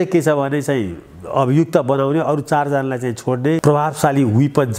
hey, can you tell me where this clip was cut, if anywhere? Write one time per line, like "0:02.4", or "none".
0:03.6